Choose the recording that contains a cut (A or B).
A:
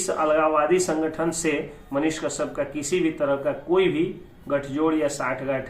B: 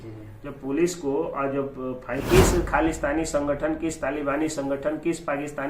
B